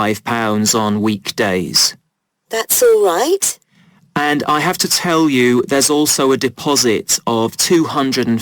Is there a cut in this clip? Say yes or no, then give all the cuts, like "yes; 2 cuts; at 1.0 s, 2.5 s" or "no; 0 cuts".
yes; 1 cut; at 7.1 s